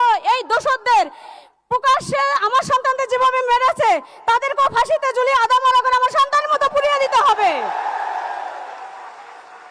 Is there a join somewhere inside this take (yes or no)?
no